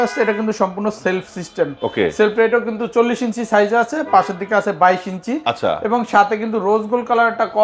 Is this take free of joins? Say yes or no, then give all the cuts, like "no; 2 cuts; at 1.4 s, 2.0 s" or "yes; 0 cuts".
yes; 0 cuts